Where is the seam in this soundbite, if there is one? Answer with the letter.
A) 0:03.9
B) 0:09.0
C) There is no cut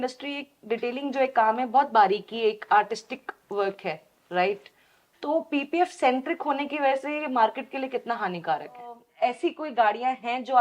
B